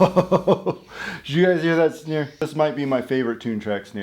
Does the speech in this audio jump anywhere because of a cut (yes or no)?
yes